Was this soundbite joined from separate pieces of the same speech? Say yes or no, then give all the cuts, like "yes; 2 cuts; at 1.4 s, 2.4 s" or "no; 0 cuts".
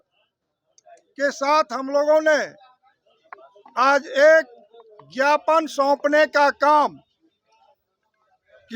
no; 0 cuts